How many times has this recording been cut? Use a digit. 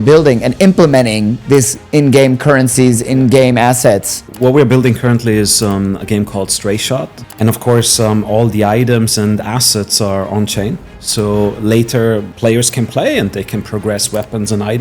3